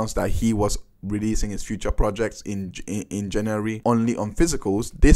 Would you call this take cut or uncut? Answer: cut